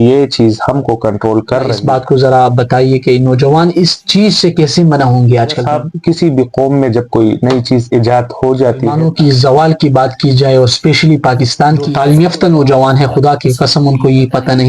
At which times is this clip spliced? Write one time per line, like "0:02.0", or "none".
0:01.8
0:05.6
0:08.9
0:11.9